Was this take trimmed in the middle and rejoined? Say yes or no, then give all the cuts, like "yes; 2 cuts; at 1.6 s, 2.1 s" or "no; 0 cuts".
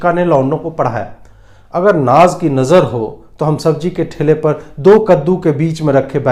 no; 0 cuts